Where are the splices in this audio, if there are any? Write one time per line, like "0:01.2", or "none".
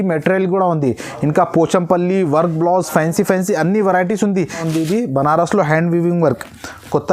0:04.6